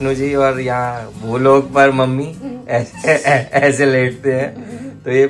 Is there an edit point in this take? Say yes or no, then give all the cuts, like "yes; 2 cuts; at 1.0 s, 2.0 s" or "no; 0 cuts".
no; 0 cuts